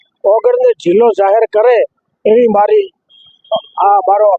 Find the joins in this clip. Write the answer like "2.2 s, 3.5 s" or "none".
none